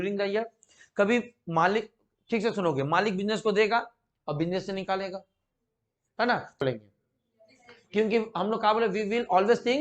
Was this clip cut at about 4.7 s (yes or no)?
no